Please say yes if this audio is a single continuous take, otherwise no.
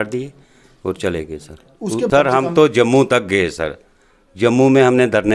no